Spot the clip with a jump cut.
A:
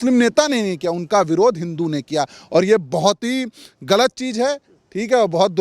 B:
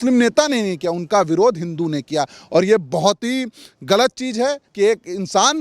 B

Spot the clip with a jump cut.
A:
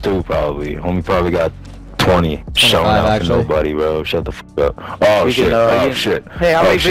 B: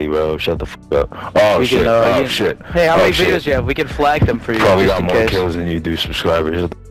A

